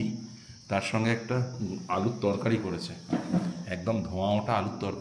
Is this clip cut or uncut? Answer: uncut